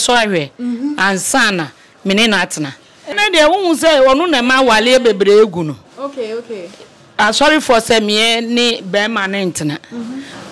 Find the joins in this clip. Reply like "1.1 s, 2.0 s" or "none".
3.1 s